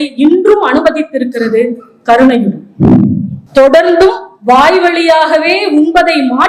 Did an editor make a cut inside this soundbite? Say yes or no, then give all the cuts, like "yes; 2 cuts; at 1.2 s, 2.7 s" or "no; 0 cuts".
yes; 1 cut; at 3.3 s